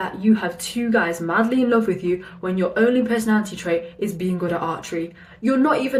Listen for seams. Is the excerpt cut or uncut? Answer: uncut